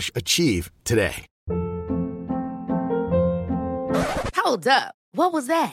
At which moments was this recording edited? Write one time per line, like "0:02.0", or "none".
0:01.3